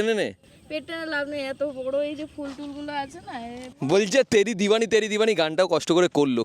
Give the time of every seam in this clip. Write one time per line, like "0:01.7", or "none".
0:03.7